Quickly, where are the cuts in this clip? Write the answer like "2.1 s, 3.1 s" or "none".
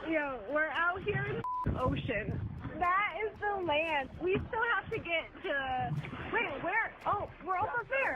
4.1 s, 6.2 s